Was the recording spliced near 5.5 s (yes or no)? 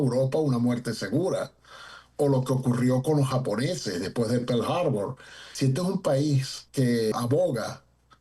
yes